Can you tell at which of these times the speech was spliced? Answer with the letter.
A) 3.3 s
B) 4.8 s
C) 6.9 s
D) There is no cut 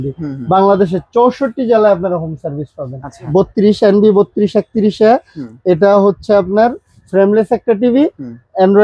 A